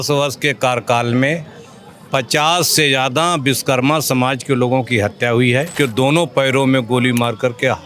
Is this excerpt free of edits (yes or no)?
no